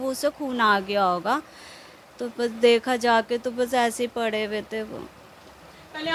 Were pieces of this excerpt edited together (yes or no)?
no